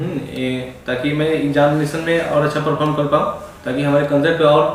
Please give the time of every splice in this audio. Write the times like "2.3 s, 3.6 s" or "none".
none